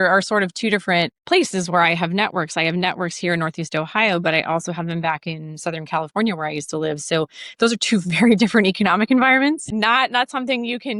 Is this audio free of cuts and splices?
yes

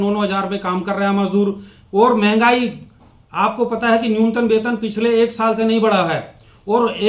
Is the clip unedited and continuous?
yes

